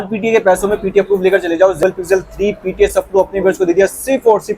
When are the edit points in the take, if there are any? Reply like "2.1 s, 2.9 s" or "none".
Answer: 1.8 s